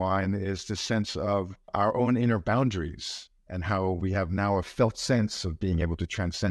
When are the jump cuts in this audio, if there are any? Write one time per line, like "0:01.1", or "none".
0:01.7